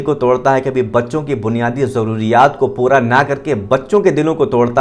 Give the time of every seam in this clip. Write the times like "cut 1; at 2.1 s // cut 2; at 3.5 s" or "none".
none